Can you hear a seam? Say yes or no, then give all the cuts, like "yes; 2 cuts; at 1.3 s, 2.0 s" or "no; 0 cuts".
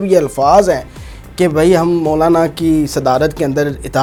no; 0 cuts